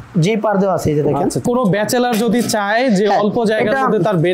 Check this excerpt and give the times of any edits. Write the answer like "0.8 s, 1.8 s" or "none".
1.4 s